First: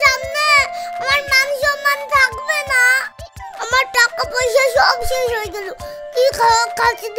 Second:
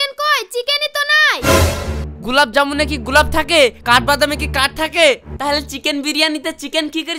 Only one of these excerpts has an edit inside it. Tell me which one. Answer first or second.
second